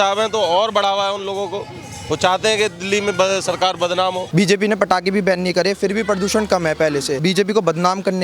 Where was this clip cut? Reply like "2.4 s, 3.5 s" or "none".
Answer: 4.2 s, 7.2 s

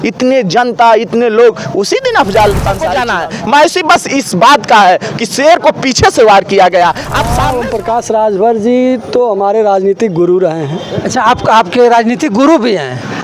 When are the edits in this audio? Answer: 3.0 s, 7.3 s

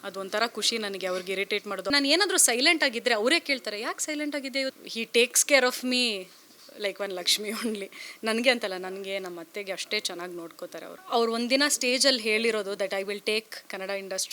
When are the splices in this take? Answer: 1.9 s, 4.8 s, 10.9 s

